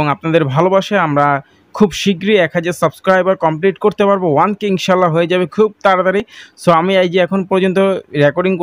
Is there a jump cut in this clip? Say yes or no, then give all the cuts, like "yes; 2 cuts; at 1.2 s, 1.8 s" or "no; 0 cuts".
no; 0 cuts